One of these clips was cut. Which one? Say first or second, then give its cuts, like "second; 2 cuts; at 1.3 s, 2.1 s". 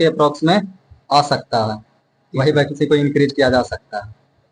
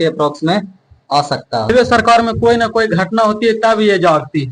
second; 1 cut; at 1.7 s